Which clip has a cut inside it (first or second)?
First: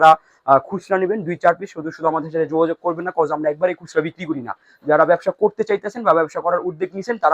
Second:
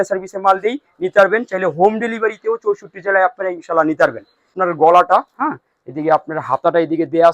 second